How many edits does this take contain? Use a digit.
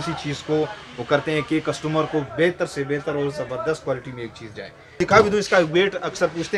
1